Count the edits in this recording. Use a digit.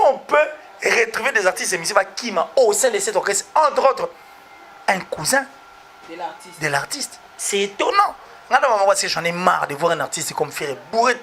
1